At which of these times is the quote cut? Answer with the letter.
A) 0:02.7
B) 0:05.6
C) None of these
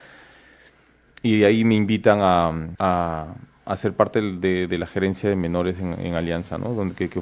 A